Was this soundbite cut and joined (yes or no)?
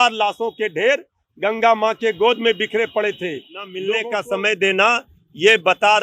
yes